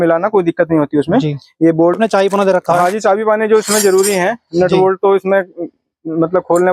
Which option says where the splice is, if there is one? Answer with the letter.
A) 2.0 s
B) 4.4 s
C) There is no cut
A